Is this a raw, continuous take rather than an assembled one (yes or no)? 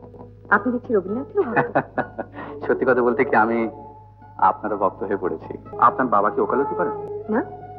no